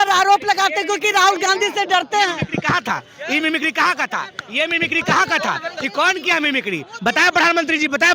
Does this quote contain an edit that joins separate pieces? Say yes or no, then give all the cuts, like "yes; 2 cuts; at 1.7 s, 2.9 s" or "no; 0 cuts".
no; 0 cuts